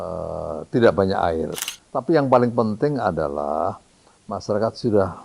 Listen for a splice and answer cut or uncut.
cut